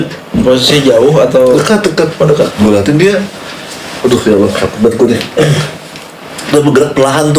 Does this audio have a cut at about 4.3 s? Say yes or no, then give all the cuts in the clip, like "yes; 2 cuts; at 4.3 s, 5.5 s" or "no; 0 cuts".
no; 1 cut; at 2.5 s